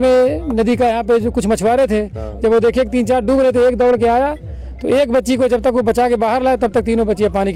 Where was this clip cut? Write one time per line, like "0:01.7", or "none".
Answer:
none